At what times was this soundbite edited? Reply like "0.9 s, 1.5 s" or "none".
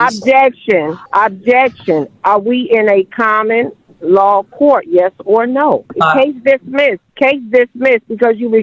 1.0 s, 5.9 s, 7.0 s